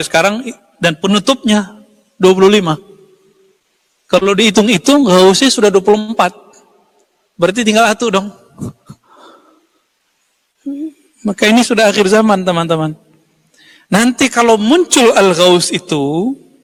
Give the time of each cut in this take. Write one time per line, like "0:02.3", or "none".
none